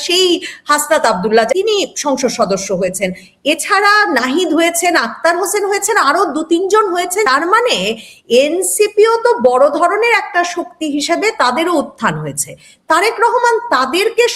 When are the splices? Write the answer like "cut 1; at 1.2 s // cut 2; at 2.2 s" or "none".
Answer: cut 1; at 1.5 s // cut 2; at 7.2 s